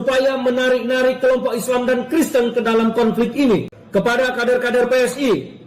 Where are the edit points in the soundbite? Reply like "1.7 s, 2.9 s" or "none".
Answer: 3.8 s

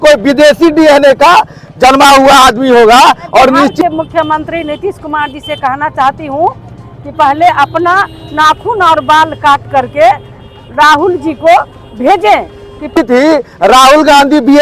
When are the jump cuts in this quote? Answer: 3.8 s, 12.9 s

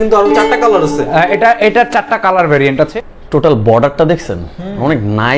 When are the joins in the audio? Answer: 2.9 s

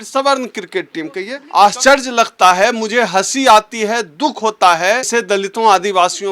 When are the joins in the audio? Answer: 1.3 s, 5.2 s

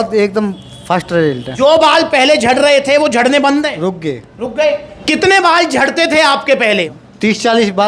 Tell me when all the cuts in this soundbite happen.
1.5 s, 6.9 s

